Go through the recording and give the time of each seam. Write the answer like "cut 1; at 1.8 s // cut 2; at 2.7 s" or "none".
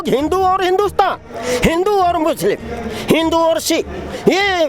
none